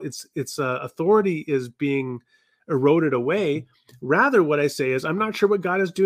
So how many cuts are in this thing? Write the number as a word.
zero